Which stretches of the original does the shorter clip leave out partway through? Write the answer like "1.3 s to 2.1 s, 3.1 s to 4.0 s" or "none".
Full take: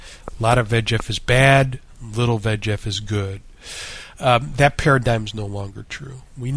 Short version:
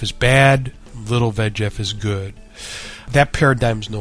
4.1 s to 4.5 s